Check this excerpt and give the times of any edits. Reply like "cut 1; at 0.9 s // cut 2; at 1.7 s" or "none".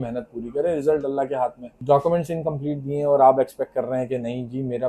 cut 1; at 1.7 s